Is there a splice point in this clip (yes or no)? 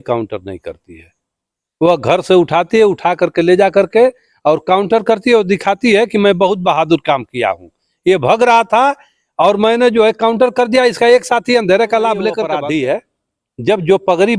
yes